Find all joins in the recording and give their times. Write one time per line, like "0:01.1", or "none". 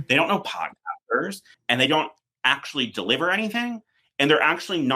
0:01.5